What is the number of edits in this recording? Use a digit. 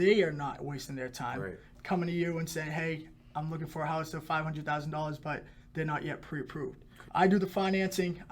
2